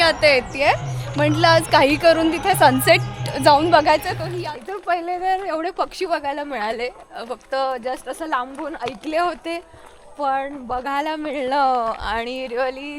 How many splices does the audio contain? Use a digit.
1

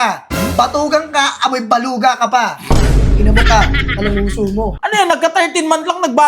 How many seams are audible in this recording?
1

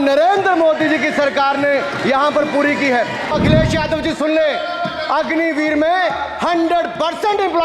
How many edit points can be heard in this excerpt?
1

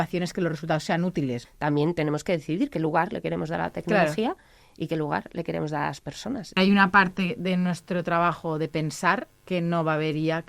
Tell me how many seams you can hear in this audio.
3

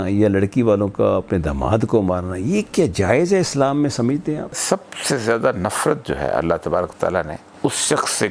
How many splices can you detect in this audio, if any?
2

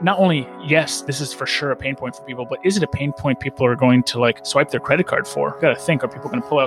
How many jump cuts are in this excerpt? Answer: 2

